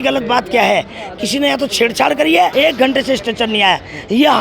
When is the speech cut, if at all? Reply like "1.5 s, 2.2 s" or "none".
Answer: 2.5 s